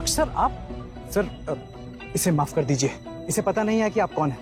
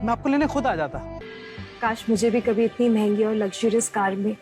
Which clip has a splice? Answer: second; 1 cut; at 1.1 s

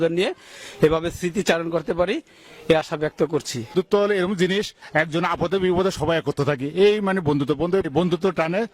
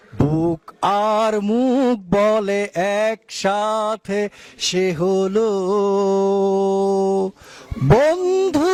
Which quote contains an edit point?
first; 3 cuts; at 3.7 s, 4.8 s, 7.8 s

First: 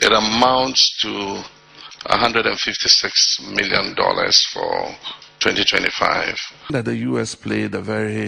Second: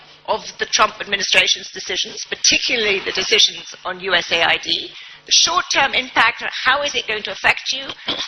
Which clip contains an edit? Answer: first; 1 cut; at 6.7 s

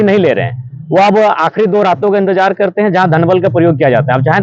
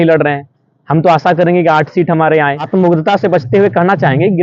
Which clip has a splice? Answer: second; 1 cut; at 2.6 s

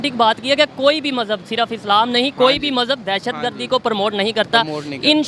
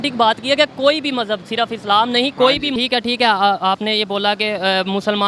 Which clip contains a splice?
second; 1 cut; at 2.7 s

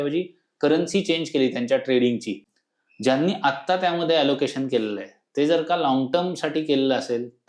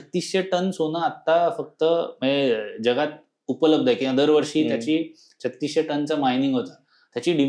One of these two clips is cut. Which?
first; 1 cut; at 2.4 s

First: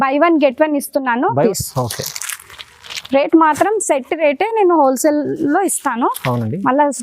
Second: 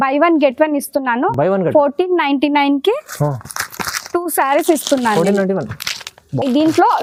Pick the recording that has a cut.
first; 1 cut; at 1.4 s

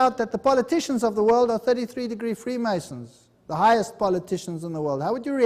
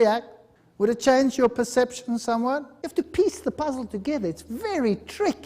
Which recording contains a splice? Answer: second; 1 cut; at 2.8 s

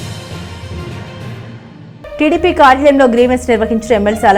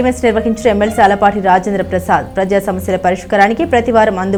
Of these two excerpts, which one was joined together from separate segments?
first; 1 cut; at 1.9 s

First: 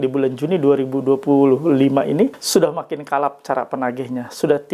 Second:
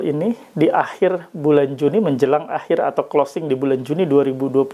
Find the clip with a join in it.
first; 1 cut; at 2.4 s

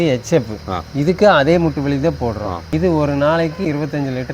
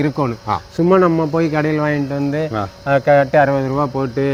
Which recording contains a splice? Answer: first; 2 cuts; at 2.6 s, 3.7 s

